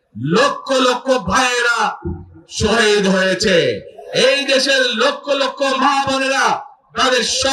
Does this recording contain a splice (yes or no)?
no